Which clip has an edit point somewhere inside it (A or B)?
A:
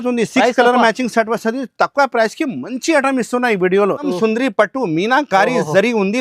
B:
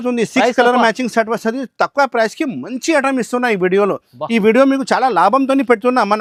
A